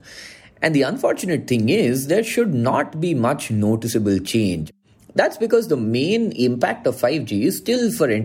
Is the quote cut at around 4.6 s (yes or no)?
yes